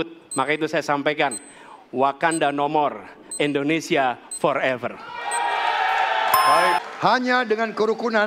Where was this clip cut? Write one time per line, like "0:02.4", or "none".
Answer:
0:06.8